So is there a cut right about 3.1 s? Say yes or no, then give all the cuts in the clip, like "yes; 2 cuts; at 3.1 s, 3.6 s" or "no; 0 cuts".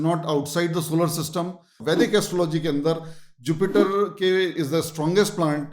no; 1 cut; at 1.8 s